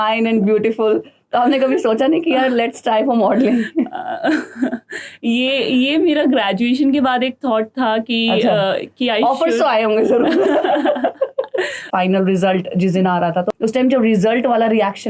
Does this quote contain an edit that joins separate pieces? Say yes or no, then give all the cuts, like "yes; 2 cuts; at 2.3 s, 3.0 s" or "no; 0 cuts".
yes; 2 cuts; at 11.9 s, 13.5 s